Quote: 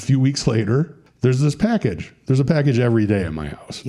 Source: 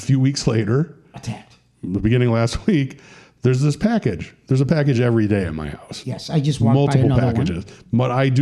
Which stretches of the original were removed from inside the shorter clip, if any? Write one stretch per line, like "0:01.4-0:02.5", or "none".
0:01.0-0:03.2